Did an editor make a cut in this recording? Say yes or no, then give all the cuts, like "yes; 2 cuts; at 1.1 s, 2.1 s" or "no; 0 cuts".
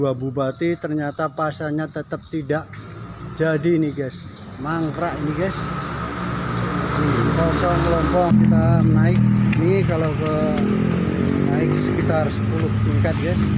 yes; 1 cut; at 8.3 s